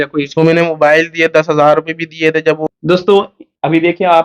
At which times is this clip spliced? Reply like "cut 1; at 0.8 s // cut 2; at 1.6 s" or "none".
cut 1; at 2.6 s